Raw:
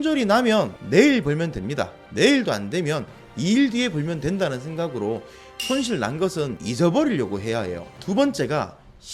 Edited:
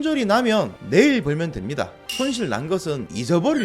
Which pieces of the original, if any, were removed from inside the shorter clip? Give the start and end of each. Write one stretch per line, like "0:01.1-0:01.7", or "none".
0:02.0-0:05.5

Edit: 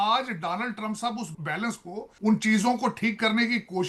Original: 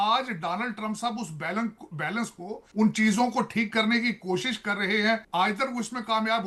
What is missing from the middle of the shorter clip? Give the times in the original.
0:01.3-0:01.9

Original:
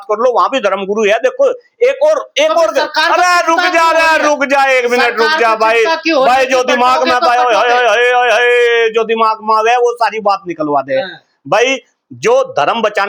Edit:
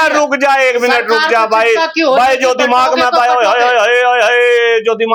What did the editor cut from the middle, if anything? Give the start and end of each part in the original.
none

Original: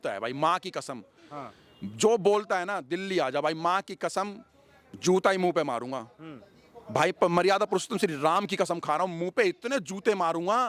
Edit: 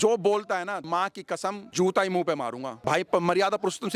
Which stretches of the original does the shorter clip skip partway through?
0:03.0-0:04.3
0:06.0-0:06.8

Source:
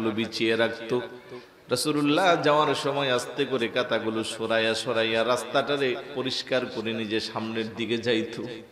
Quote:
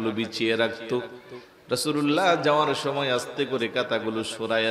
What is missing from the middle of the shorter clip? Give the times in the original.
none

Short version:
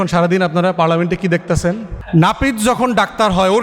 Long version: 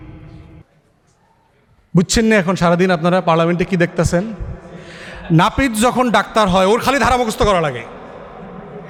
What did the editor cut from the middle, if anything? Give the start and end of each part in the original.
0:04.4-0:05.1

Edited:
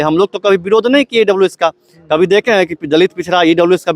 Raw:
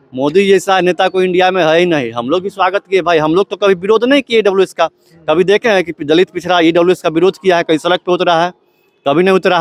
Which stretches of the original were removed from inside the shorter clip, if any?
none

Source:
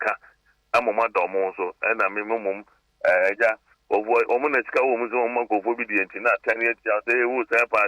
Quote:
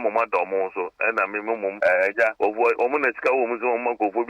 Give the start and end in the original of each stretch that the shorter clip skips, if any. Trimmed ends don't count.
0:02.6-0:03.0
0:03.6-0:03.8

